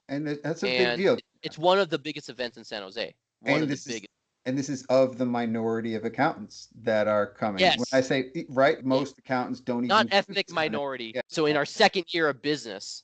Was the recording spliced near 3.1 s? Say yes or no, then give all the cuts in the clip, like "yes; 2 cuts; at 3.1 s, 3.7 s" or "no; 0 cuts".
no; 3 cuts; at 1.4 s, 8.8 s, 11.2 s